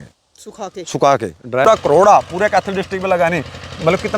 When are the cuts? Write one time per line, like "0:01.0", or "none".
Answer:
0:01.6